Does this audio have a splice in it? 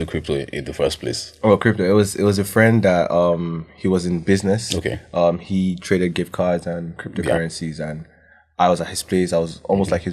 no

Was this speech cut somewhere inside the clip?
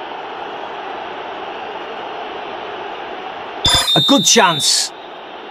no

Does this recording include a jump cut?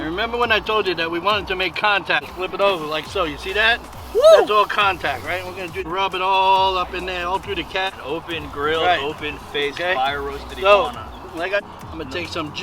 yes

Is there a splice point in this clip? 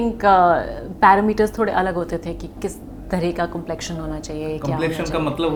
no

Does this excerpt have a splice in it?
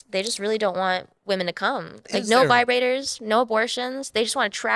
yes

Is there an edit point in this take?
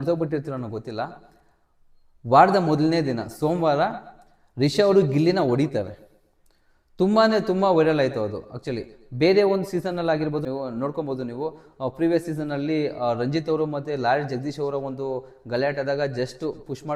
no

